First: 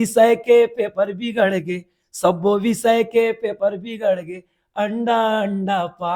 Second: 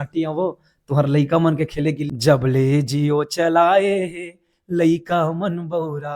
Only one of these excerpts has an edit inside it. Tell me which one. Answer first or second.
second